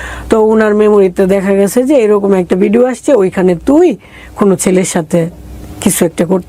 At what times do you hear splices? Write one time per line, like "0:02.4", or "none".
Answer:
none